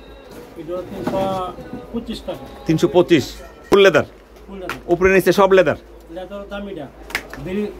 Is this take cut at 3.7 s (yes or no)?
yes